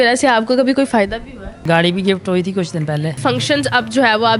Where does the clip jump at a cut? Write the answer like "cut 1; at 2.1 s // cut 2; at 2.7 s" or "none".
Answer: cut 1; at 1.6 s // cut 2; at 3.2 s